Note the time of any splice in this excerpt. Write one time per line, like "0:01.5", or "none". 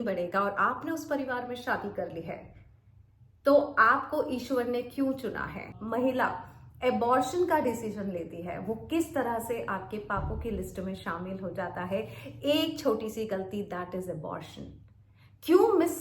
0:05.7